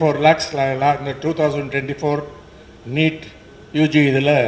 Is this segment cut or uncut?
uncut